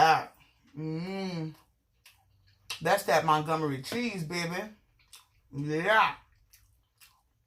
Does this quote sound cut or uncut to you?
uncut